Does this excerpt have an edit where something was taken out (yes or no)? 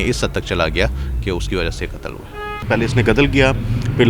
yes